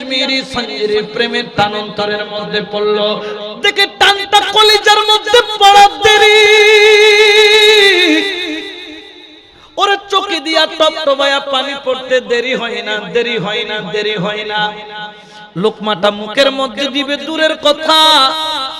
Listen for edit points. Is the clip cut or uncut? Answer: cut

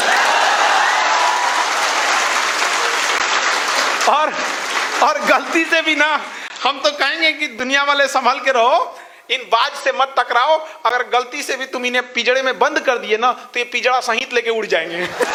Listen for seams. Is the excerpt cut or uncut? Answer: uncut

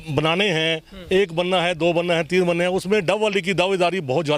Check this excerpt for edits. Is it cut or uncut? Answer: uncut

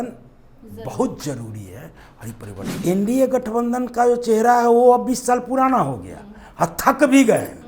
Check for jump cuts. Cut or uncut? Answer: cut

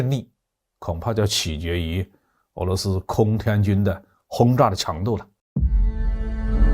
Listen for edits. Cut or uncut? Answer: cut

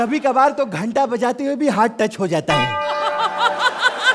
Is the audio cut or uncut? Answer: uncut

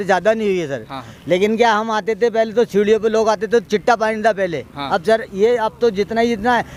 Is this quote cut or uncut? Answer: uncut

